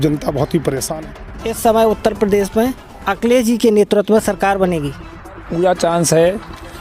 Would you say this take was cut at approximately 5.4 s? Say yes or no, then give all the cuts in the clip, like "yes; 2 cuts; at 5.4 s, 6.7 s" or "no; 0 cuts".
yes; 2 cuts; at 1.0 s, 5.4 s